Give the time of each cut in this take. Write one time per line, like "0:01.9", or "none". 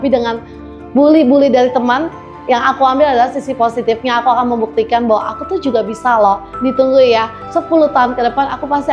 0:06.5
0:07.4

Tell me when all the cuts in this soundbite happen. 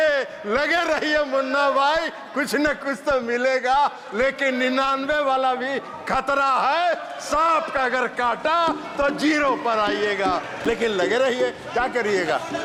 none

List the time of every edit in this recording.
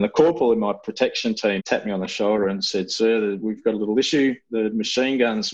0:01.6

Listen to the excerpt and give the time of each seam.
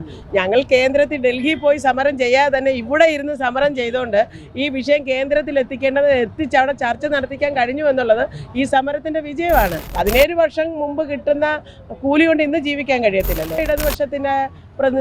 0:09.8
0:13.6

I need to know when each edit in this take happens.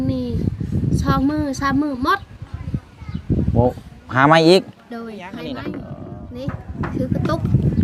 0:05.6

